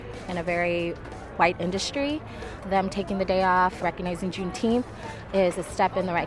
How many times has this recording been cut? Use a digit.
3